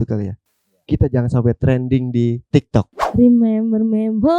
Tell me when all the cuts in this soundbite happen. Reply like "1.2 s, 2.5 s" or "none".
3.0 s